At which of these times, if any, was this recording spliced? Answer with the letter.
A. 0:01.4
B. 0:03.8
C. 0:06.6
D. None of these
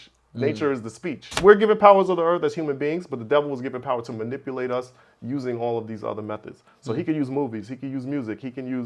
A